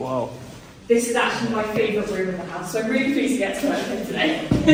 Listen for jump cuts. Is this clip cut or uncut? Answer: uncut